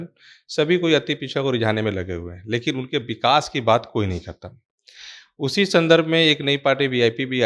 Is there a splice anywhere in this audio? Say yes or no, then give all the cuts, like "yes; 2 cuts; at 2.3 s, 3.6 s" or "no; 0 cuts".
no; 0 cuts